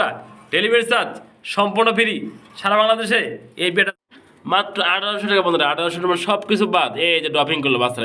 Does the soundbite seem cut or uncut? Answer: cut